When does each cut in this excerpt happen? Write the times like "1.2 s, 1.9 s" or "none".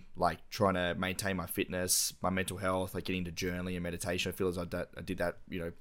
none